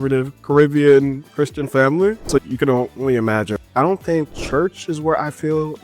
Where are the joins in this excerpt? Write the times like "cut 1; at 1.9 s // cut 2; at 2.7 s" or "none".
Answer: cut 1; at 2.5 s // cut 2; at 3.6 s // cut 3; at 4.4 s